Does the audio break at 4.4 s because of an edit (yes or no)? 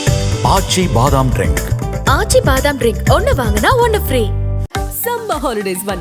no